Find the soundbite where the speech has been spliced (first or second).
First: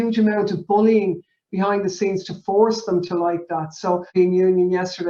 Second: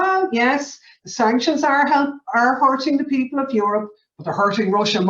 first